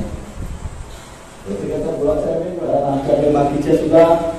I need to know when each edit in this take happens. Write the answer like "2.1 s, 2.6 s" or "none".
2.6 s